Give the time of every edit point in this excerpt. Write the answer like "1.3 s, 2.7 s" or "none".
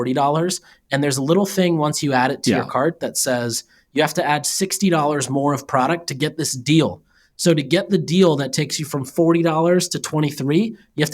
none